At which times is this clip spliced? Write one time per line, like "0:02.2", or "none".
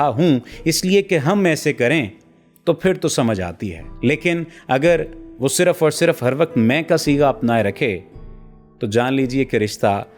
none